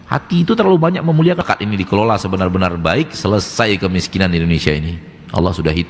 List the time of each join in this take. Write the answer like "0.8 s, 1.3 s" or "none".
1.4 s